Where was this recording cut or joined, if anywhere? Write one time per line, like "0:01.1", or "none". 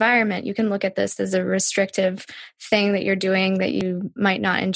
0:03.8